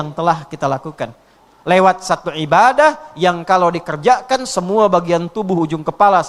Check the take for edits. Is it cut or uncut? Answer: cut